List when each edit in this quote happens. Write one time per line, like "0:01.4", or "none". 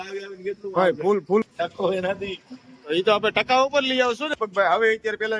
0:01.5
0:04.2